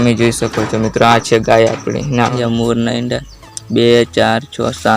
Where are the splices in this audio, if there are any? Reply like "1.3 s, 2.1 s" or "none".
2.3 s